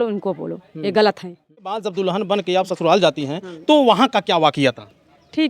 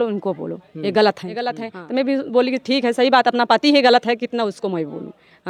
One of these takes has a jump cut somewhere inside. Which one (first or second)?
first